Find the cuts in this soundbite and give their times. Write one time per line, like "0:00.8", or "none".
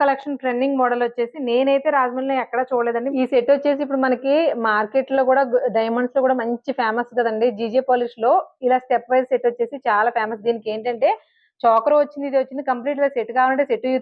0:03.1